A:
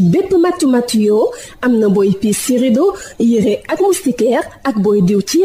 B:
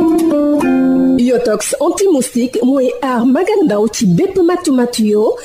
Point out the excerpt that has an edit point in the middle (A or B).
B